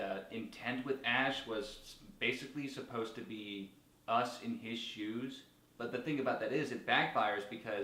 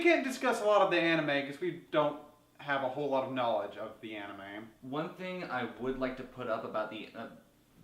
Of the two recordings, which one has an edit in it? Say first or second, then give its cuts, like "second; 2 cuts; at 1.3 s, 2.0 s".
second; 1 cut; at 6.8 s